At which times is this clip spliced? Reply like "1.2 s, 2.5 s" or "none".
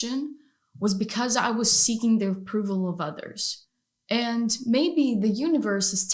3.5 s